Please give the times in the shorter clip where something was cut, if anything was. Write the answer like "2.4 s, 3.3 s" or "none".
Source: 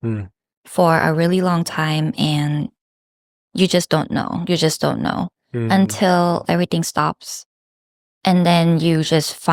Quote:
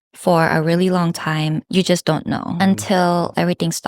1.6 s, 2.6 s